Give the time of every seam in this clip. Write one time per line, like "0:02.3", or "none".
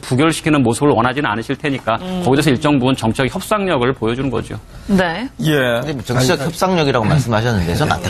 0:01.8